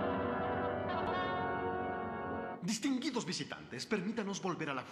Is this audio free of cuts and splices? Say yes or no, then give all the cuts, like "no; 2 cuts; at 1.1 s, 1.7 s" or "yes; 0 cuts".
yes; 0 cuts